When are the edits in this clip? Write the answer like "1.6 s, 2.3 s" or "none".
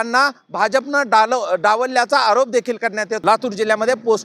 3.1 s